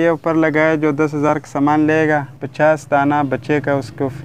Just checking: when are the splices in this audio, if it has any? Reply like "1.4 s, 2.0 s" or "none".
2.4 s